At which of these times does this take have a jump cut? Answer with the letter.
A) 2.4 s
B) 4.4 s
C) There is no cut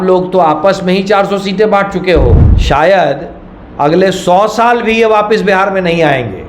A